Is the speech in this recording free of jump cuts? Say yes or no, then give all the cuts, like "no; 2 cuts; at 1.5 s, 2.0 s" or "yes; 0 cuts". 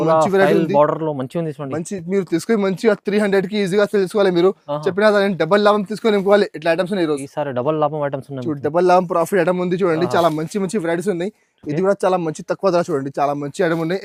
yes; 0 cuts